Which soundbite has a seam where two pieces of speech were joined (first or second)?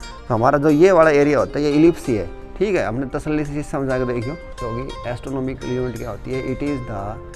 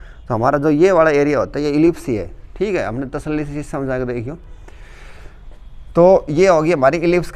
first